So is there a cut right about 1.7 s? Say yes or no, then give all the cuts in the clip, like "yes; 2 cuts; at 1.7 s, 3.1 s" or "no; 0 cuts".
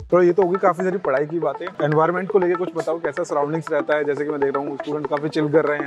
yes; 1 cut; at 1.7 s